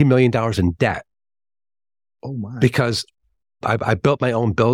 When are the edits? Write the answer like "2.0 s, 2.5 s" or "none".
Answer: none